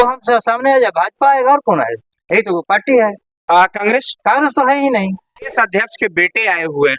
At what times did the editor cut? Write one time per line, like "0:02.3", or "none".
0:05.5